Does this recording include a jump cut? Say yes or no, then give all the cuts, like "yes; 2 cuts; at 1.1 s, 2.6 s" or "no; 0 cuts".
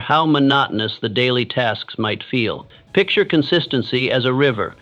yes; 1 cut; at 2.7 s